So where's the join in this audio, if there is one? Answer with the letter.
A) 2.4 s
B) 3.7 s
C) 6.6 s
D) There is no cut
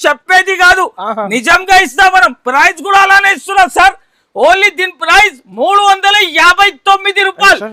D